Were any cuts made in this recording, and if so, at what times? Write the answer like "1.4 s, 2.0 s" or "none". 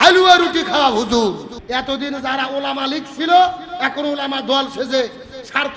1.5 s